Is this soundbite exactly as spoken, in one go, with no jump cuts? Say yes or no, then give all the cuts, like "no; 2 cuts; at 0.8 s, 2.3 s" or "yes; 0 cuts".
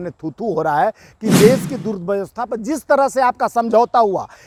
yes; 0 cuts